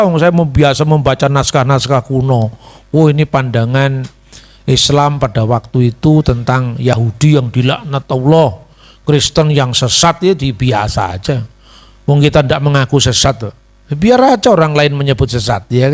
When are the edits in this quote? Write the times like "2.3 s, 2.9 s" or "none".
none